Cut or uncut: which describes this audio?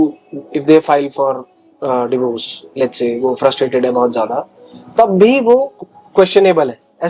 uncut